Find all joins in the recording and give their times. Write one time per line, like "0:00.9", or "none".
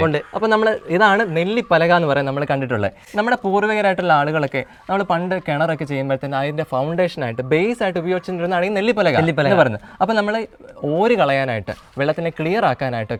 none